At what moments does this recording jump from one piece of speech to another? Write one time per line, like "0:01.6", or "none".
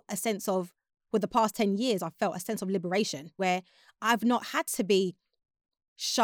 0:03.4